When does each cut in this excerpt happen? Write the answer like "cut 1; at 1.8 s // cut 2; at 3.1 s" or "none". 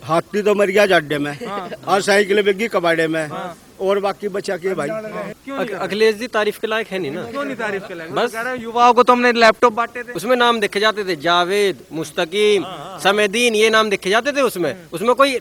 cut 1; at 5.4 s // cut 2; at 10.1 s

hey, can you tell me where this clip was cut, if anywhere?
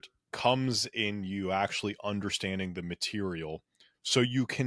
none

